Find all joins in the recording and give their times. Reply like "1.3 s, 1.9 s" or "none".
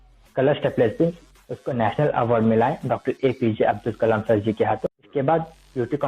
5.0 s